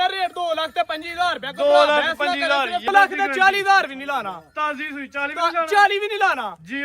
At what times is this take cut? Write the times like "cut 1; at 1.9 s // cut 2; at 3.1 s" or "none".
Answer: cut 1; at 2.9 s